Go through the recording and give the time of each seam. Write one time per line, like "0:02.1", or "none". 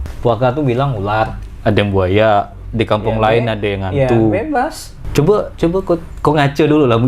0:04.9